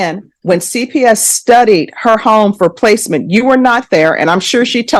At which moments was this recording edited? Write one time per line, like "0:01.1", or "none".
0:02.8